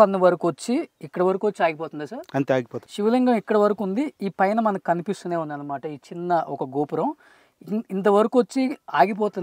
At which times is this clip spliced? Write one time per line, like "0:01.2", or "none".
0:02.8